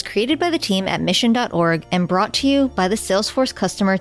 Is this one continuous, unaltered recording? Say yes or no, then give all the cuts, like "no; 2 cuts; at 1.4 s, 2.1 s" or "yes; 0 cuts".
yes; 0 cuts